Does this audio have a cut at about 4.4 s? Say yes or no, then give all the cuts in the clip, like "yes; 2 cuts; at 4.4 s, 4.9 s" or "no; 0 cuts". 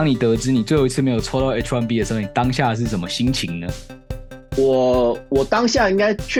no; 0 cuts